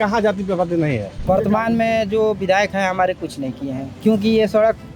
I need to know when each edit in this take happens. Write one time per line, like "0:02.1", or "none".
0:01.1
0:03.9